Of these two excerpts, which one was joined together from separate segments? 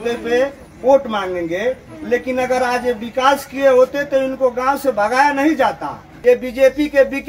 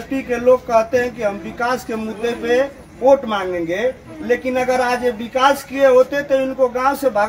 first; 1 cut; at 6.1 s

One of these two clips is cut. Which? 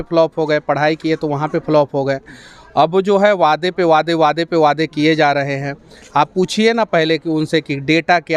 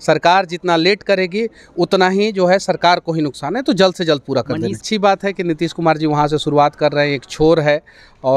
second; 1 cut; at 4.8 s

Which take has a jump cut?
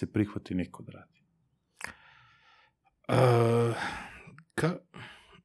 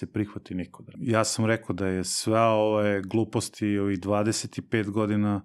second; 1 cut; at 0.9 s

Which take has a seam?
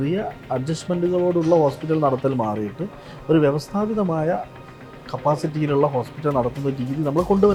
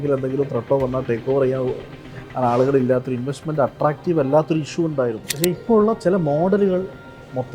second; 1 cut; at 5.3 s

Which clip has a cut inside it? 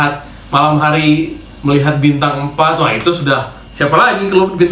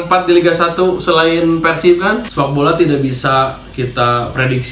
second; 1 cut; at 2.2 s

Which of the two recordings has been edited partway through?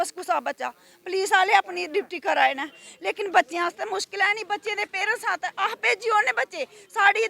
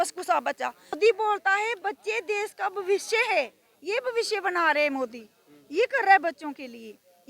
second; 1 cut; at 1.0 s

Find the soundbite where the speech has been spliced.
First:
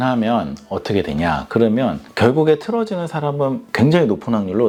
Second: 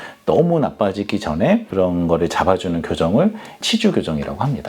second; 1 cut; at 1.7 s

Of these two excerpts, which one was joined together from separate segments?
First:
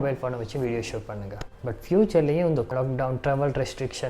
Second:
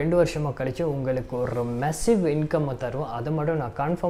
first; 2 cuts; at 1.4 s, 2.7 s

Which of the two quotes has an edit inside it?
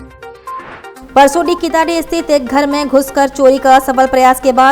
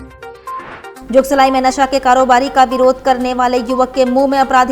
first; 1 cut; at 0.9 s

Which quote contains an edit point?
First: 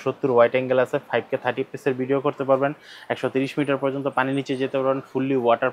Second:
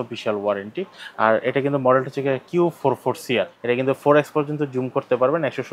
second; 1 cut; at 3.6 s

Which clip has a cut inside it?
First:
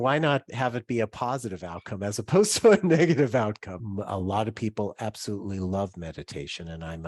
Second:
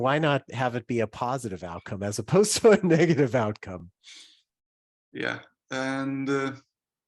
first; 1 cut; at 3.8 s

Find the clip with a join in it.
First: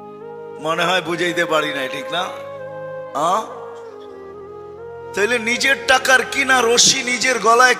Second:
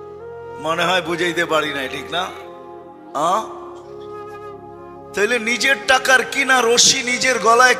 first; 2 cuts; at 3.6 s, 5.1 s

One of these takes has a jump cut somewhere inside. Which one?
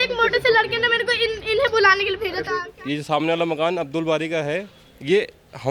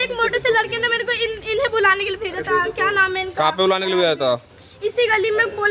first; 1 cut; at 2.5 s

